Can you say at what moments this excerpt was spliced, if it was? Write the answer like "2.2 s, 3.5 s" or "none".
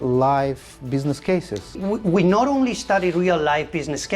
1.7 s